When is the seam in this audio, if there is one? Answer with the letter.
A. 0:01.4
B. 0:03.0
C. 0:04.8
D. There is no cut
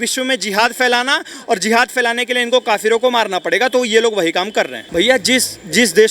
C